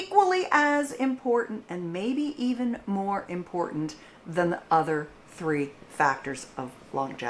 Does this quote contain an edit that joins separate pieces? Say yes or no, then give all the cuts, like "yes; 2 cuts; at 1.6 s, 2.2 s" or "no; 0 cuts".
no; 0 cuts